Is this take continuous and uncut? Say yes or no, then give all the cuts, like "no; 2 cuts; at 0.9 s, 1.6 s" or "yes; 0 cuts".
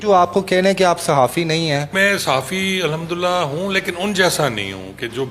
no; 1 cut; at 1.9 s